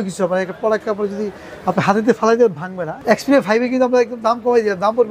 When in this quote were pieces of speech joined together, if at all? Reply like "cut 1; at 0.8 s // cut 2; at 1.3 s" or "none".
cut 1; at 3.0 s